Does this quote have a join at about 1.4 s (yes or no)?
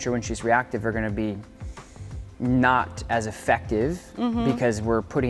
no